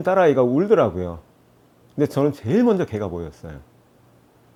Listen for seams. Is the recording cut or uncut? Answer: uncut